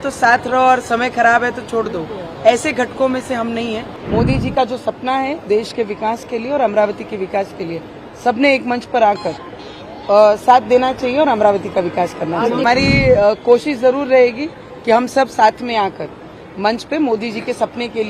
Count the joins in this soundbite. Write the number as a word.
two